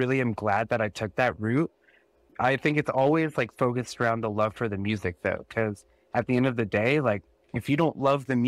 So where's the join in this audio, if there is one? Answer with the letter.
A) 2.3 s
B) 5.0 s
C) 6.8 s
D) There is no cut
A